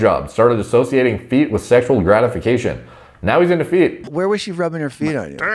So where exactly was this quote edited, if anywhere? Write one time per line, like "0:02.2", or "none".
0:04.1